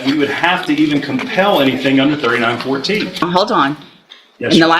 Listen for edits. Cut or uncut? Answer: cut